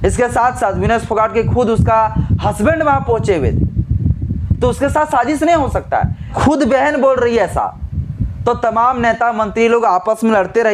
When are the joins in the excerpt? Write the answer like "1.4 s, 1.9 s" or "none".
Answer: 6.4 s